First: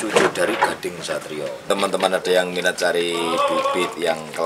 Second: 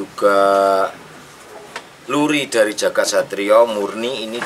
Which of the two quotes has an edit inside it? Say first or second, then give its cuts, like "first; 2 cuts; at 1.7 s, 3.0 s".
first; 1 cut; at 1.7 s